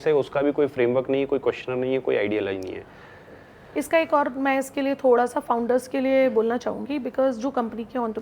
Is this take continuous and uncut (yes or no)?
yes